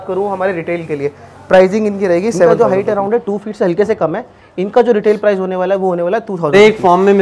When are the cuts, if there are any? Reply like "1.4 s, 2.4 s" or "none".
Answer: 2.5 s, 6.5 s

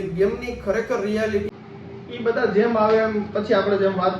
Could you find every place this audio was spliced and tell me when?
1.9 s

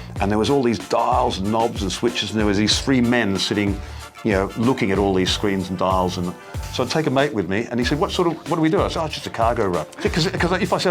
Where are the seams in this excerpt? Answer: 6.6 s, 9.9 s

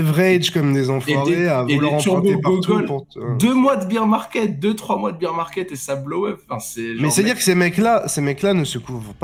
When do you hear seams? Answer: none

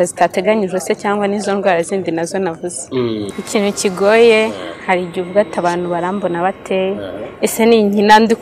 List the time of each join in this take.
3.3 s

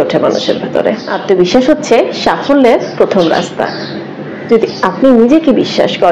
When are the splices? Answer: 1.1 s

